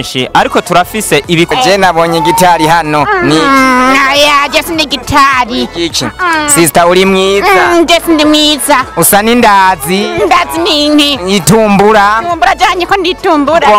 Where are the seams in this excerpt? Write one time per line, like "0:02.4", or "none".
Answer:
0:01.5

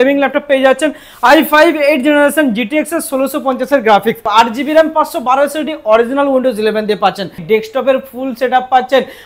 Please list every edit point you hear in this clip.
0:04.2
0:07.4

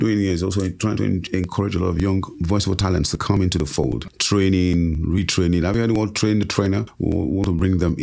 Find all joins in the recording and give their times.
0:02.3
0:04.1
0:06.9

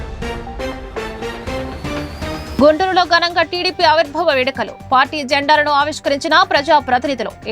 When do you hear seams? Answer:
none

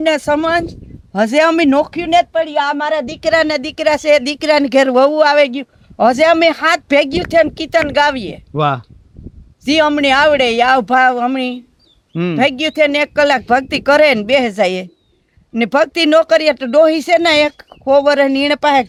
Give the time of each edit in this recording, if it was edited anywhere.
none

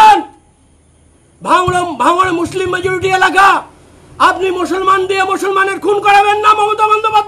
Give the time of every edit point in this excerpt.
none

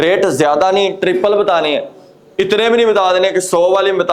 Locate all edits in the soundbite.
none

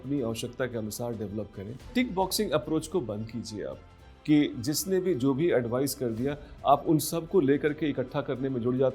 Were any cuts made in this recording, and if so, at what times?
0:01.9

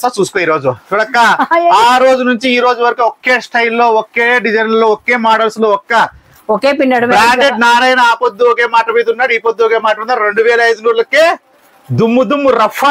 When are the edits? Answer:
none

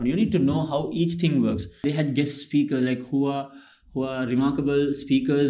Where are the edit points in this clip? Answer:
0:01.8

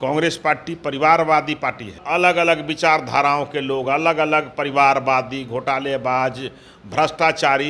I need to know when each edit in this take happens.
0:02.0

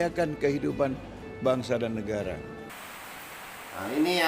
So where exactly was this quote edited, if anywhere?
0:02.7

